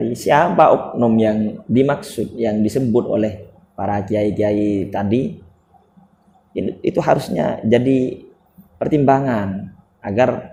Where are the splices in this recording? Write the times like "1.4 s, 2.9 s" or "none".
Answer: none